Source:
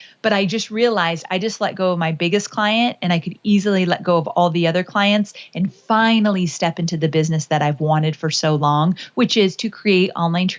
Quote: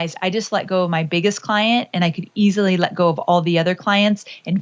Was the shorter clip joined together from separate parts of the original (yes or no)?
no